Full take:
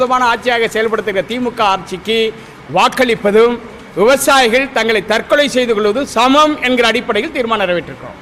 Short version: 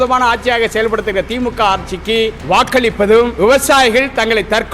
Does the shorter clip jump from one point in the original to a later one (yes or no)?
yes